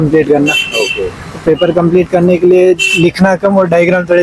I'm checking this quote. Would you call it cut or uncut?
uncut